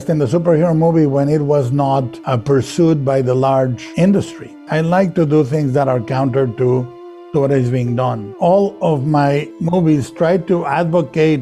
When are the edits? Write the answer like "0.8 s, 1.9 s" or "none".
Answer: 8.3 s